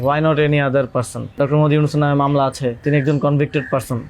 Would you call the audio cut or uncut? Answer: cut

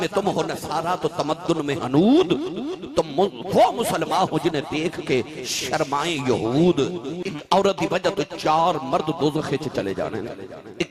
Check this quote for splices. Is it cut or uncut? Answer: cut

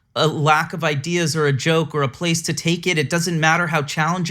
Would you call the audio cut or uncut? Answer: uncut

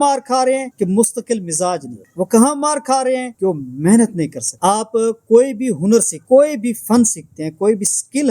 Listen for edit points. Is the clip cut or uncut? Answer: cut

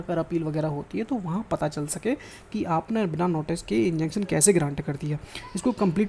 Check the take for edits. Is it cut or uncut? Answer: uncut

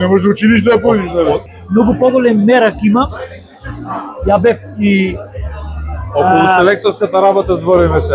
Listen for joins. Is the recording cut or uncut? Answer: cut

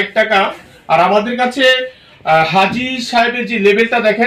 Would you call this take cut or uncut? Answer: uncut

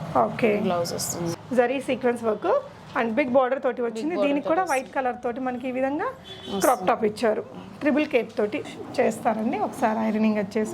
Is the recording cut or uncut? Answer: cut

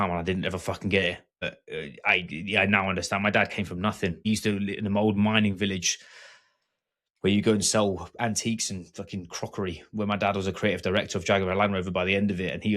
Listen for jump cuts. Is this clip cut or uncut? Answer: cut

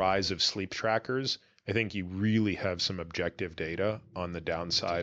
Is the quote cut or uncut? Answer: uncut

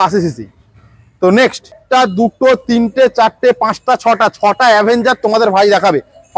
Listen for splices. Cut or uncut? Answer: cut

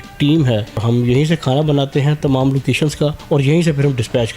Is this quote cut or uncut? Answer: cut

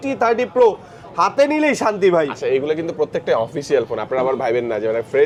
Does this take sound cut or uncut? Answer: uncut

